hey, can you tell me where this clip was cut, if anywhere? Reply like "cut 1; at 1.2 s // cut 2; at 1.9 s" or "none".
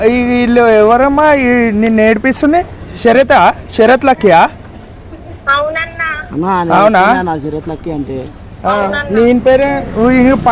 none